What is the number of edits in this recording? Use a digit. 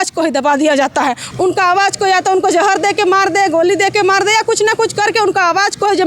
1